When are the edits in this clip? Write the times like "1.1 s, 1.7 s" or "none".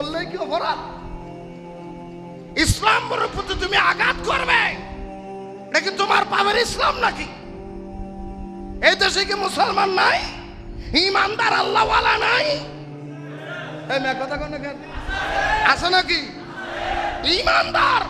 none